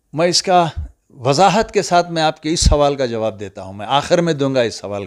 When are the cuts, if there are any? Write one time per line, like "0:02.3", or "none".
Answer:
none